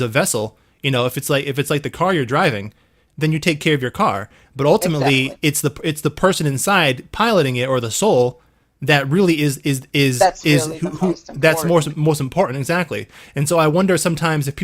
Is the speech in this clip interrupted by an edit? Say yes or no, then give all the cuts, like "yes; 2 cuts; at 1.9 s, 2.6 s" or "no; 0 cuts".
no; 0 cuts